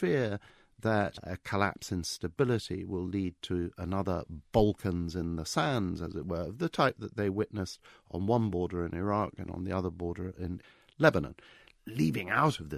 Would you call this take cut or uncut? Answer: cut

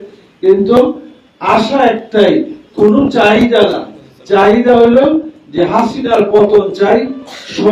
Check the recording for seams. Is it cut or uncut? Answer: uncut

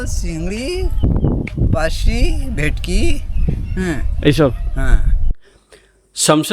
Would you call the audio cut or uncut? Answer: uncut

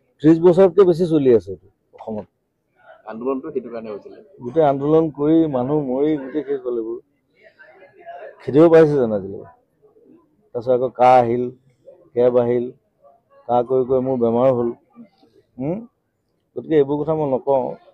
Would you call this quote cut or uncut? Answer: uncut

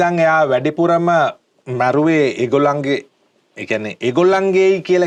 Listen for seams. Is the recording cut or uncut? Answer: uncut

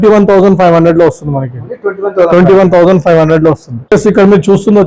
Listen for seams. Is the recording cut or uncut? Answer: uncut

